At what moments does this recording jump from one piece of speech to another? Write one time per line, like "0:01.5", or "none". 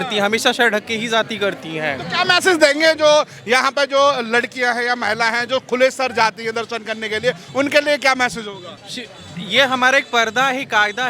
none